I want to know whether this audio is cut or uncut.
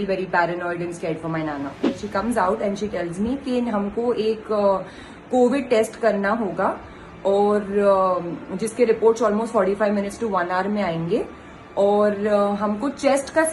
cut